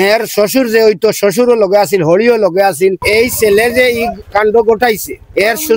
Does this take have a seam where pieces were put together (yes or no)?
yes